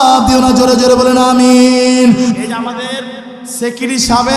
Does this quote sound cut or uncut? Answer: cut